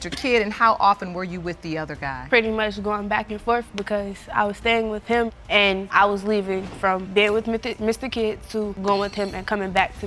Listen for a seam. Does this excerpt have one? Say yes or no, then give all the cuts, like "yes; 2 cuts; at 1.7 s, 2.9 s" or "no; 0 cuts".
no; 0 cuts